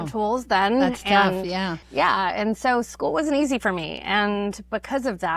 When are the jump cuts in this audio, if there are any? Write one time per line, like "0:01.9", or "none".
0:01.8

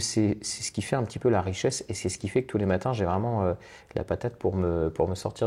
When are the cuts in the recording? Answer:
none

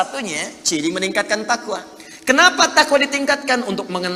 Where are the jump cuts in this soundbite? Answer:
none

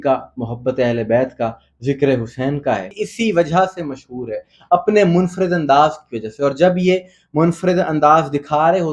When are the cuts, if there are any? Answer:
0:03.1

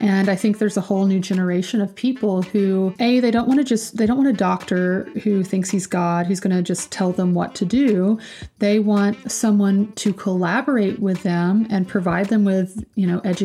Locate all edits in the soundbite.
0:02.9
0:09.2

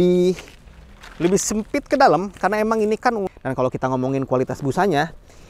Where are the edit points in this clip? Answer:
0:03.3

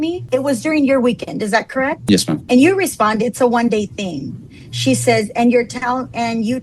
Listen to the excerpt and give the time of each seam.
0:02.4

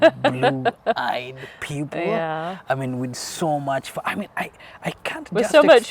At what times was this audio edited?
none

